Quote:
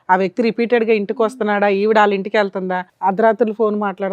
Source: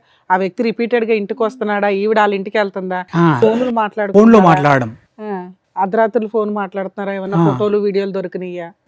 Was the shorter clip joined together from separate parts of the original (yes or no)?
yes